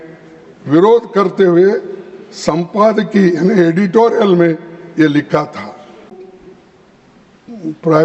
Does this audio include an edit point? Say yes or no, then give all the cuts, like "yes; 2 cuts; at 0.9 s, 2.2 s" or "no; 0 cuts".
yes; 1 cut; at 6.2 s